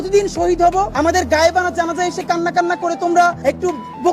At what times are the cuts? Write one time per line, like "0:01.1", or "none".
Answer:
0:00.9
0:03.4